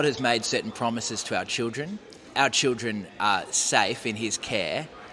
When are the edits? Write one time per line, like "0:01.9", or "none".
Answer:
0:02.3